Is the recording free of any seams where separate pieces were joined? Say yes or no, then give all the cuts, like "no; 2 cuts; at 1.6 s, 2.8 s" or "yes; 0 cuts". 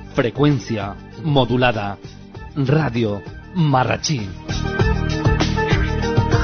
yes; 0 cuts